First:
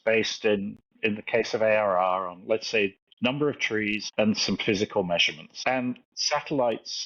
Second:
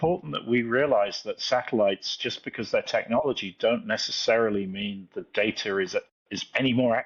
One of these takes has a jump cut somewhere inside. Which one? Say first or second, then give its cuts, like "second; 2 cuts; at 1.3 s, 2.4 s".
first; 4 cuts; at 3.0 s, 4.0 s, 5.4 s, 6.1 s